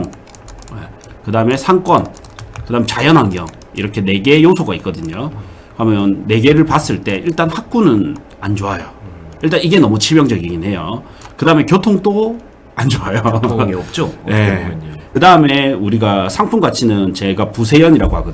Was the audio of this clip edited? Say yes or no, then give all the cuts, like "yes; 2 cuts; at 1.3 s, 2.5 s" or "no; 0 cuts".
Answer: yes; 1 cut; at 14.9 s